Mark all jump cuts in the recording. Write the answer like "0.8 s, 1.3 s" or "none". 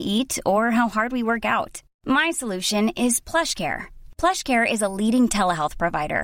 none